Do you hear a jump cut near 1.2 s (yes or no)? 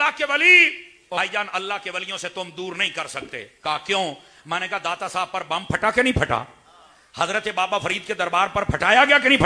yes